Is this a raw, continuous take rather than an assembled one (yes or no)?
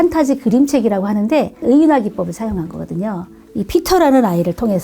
no